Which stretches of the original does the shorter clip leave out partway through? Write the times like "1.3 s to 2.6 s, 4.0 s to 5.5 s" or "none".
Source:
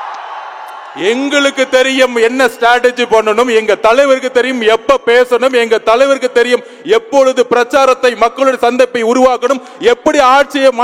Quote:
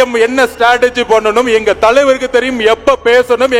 none